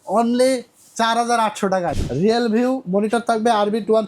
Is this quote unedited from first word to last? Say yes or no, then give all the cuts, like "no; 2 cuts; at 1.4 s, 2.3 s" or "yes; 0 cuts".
no; 1 cut; at 1.9 s